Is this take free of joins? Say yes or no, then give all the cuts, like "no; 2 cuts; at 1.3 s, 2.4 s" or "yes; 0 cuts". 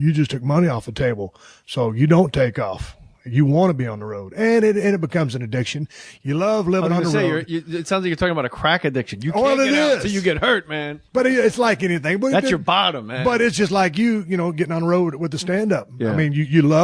yes; 0 cuts